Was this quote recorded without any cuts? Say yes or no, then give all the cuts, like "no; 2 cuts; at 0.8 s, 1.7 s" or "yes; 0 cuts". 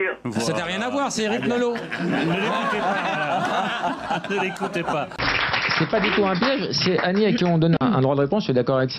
yes; 0 cuts